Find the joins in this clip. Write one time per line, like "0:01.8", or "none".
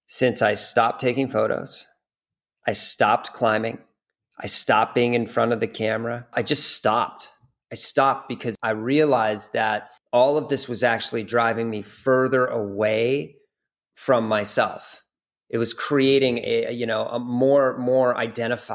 0:06.3
0:08.6
0:09.9